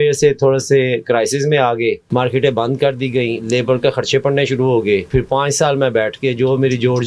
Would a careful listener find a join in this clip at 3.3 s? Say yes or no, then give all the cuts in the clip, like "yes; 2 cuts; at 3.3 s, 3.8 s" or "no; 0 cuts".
no; 2 cuts; at 2.0 s, 5.1 s